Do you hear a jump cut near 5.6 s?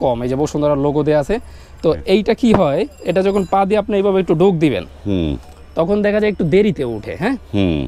no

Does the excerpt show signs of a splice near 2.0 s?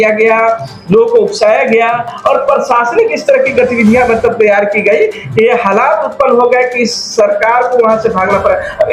no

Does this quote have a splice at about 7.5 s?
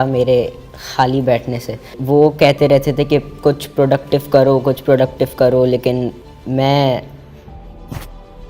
no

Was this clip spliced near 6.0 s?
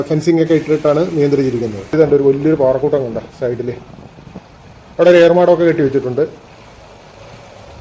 no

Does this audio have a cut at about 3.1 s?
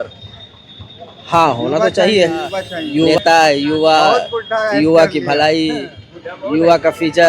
yes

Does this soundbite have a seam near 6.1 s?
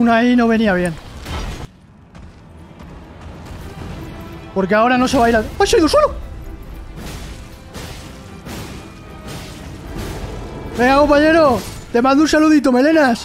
no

